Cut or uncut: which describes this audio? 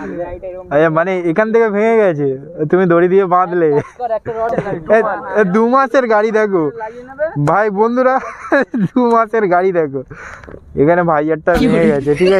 cut